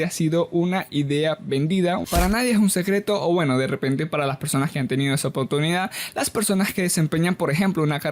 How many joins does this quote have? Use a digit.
1